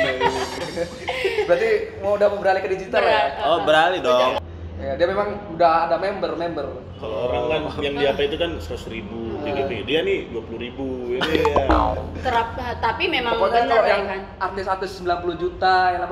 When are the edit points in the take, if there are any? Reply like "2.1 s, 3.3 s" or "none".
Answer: 4.4 s